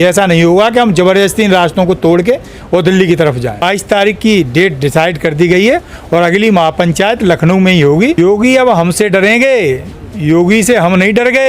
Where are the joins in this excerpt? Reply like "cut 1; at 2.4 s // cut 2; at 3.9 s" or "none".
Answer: cut 1; at 3.6 s // cut 2; at 8.2 s